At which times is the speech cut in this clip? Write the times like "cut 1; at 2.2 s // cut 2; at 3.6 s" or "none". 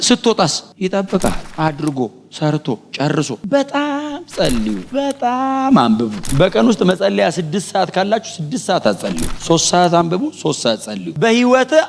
cut 1; at 3.4 s // cut 2; at 11.0 s